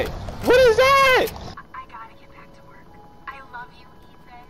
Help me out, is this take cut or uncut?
cut